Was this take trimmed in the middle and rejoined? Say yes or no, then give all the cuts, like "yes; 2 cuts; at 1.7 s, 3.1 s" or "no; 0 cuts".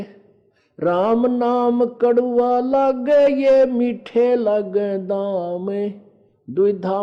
no; 0 cuts